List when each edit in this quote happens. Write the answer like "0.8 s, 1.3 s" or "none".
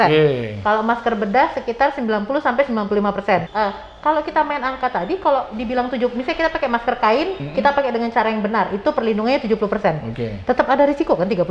3.5 s